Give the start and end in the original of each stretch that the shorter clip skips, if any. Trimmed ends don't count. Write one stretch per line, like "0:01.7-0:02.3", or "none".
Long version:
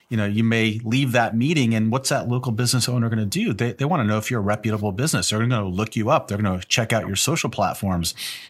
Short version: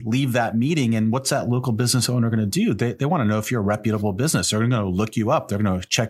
none